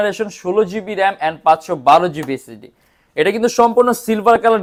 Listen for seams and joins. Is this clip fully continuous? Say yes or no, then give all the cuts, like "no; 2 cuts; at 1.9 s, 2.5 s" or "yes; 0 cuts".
yes; 0 cuts